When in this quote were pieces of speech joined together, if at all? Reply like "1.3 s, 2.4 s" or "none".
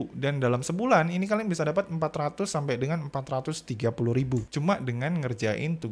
4.5 s